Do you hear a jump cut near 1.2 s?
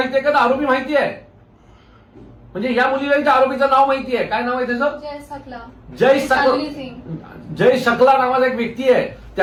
no; 0 cuts

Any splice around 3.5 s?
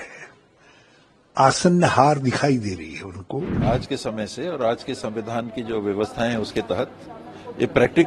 yes; 1 cut; at 3.5 s

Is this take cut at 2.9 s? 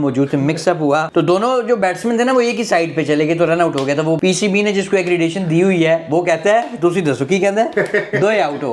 no; 2 cuts; at 1.1 s, 4.2 s

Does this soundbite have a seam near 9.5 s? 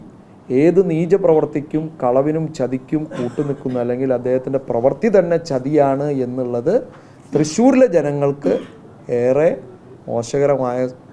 no; 0 cuts

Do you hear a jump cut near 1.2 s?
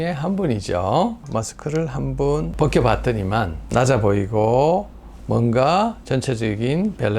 yes; 1 cut; at 1.2 s

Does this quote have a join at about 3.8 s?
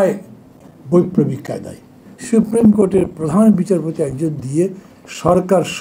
no; 1 cut; at 2.0 s

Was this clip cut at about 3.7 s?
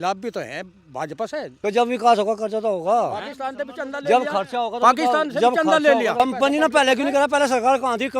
no; 2 cuts; at 1.5 s, 6.2 s

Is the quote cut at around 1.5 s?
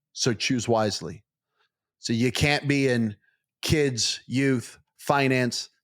yes; 1 cut; at 1.5 s

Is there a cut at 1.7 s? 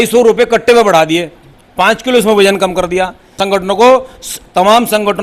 no; 1 cut; at 3.4 s

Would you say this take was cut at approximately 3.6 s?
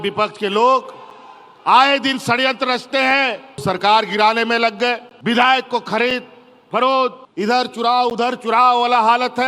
yes; 3 cuts; at 3.6 s, 5.1 s, 7.2 s

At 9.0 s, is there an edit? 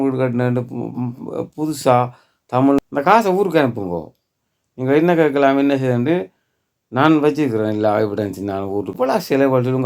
yes; 2 cuts; at 2.8 s, 9.0 s

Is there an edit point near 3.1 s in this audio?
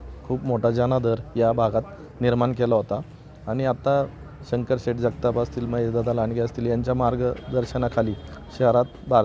no; 0 cuts

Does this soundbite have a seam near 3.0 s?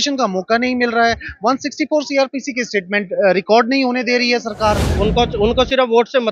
no; 1 cut; at 4.9 s

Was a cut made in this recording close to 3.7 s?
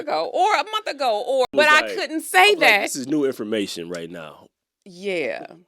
no; 1 cut; at 1.5 s

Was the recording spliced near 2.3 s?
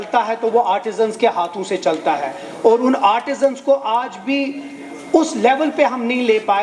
no; 0 cuts

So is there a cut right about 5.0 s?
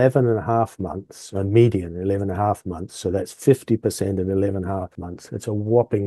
yes; 1 cut; at 5.0 s

